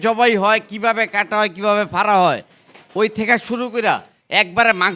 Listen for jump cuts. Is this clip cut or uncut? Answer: uncut